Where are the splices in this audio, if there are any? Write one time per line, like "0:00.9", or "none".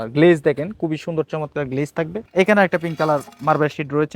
0:02.2